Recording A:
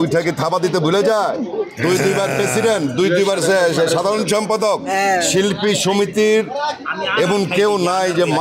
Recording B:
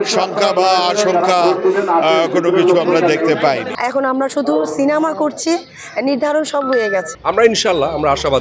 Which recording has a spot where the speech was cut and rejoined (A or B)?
B